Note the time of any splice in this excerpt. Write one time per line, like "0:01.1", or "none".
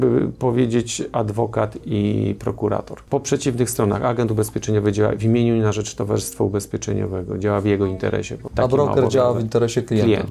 0:03.0
0:08.4